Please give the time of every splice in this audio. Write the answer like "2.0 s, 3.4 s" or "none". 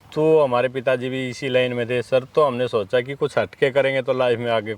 none